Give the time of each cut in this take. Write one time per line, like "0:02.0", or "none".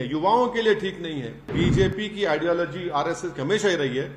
0:01.5